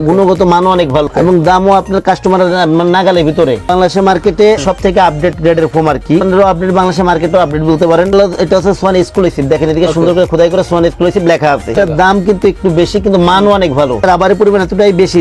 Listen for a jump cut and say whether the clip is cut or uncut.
cut